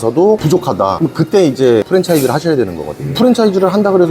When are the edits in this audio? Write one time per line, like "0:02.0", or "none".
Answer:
0:01.8